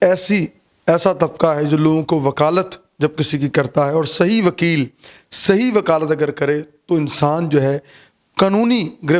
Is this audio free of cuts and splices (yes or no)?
yes